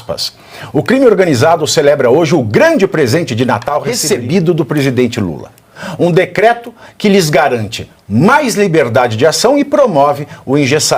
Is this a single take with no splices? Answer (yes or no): no